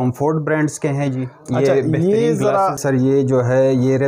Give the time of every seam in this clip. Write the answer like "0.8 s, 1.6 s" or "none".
2.8 s